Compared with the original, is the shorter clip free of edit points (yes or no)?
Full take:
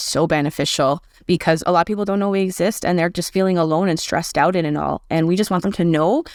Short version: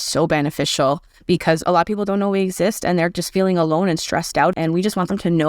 no